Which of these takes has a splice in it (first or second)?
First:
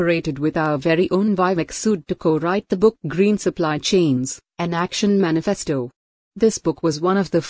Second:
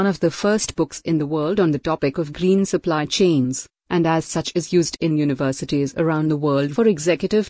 second